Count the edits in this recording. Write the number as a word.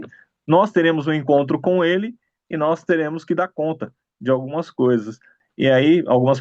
one